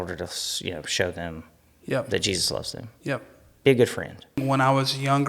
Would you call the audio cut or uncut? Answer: cut